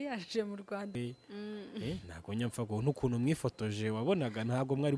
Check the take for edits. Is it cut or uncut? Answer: cut